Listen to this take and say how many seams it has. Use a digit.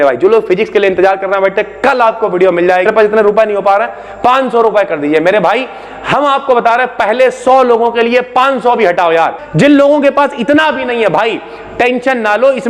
2